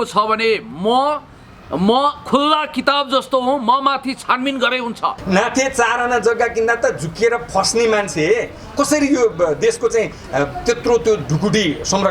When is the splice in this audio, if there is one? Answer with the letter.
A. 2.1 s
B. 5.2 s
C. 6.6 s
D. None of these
B